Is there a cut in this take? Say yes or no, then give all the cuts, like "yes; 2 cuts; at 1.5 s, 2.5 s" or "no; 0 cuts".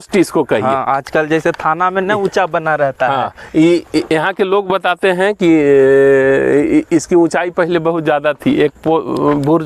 no; 0 cuts